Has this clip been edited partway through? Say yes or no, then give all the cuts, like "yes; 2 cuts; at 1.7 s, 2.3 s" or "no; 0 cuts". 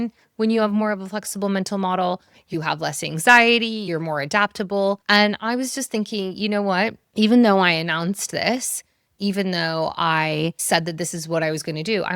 yes; 4 cuts; at 2.5 s, 3.9 s, 5.0 s, 10.6 s